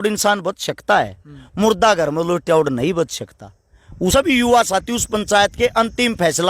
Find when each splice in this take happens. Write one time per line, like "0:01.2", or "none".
0:04.1